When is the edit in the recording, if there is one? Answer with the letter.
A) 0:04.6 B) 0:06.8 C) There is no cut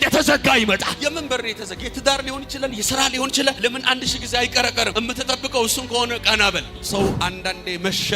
B